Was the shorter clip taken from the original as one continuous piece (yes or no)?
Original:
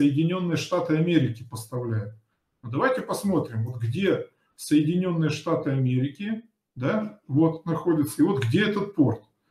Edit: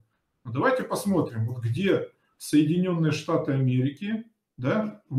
yes